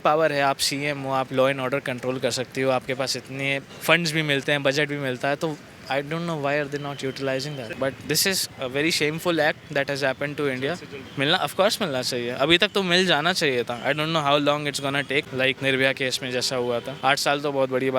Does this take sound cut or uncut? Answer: cut